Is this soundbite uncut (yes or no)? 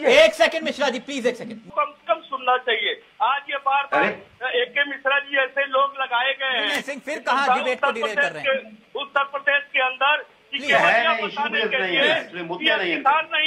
no